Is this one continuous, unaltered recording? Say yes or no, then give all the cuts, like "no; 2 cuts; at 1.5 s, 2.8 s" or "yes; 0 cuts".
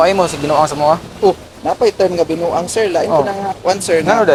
yes; 0 cuts